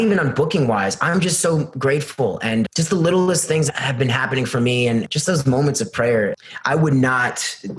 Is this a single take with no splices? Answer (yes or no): no